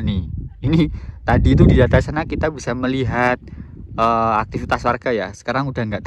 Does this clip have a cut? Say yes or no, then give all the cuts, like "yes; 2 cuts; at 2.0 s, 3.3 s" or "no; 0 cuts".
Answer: no; 0 cuts